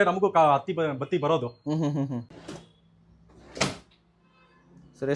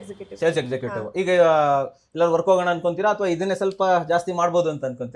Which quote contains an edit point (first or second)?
first